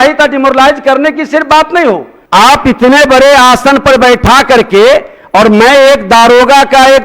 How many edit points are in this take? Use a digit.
1